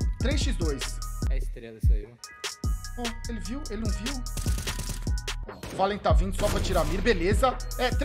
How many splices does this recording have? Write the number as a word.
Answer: one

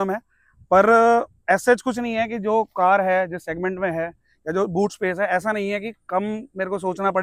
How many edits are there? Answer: zero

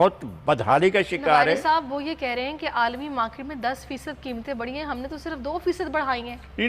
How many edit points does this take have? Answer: zero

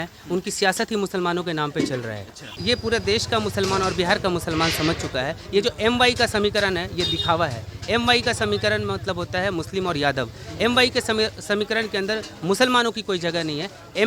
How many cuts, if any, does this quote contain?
one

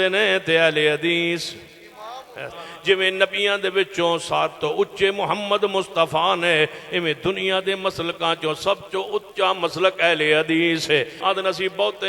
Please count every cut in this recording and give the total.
two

